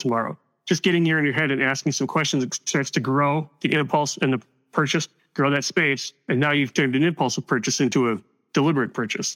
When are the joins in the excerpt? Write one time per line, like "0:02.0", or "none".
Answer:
0:06.1